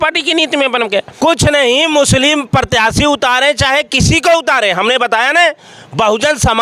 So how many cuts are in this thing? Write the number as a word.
one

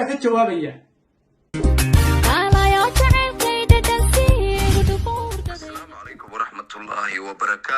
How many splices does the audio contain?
one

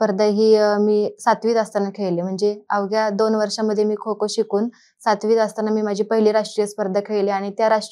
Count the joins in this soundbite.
zero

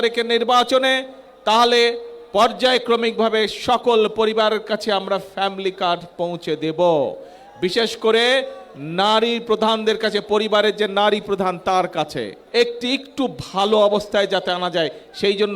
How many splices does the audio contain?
one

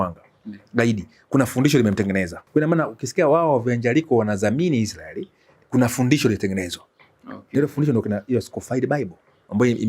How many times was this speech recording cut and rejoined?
one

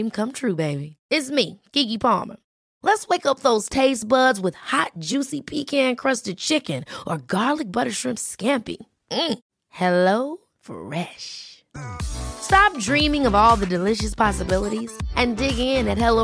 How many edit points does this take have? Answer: zero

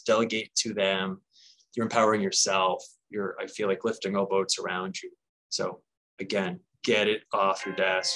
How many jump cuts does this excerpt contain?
zero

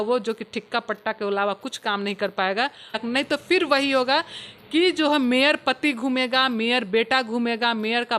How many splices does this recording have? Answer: one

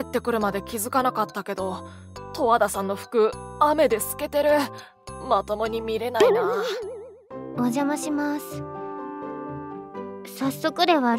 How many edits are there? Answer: zero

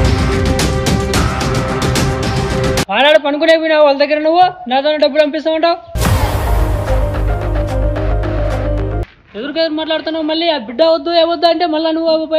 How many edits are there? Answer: three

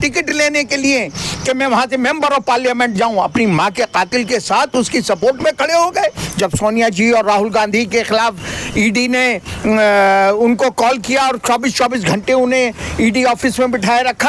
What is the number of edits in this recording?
one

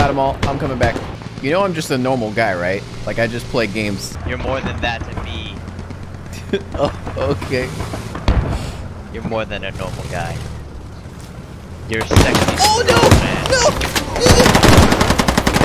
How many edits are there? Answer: three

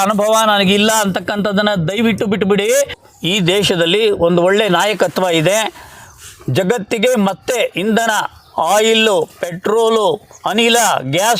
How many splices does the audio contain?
one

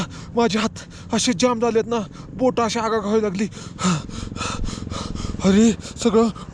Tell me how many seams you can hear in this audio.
zero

